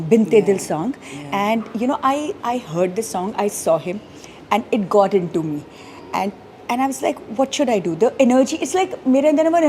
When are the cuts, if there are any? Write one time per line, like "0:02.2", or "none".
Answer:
none